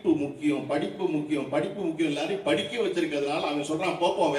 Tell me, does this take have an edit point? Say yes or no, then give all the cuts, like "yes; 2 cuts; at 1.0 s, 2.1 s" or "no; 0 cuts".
no; 0 cuts